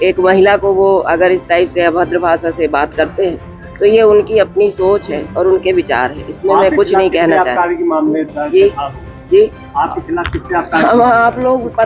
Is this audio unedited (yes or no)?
yes